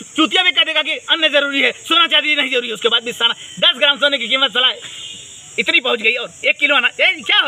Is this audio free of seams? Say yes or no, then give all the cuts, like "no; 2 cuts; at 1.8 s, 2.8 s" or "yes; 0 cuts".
yes; 0 cuts